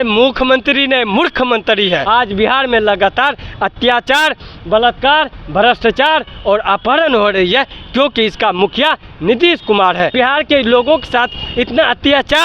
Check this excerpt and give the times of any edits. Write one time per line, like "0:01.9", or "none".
0:02.0
0:10.1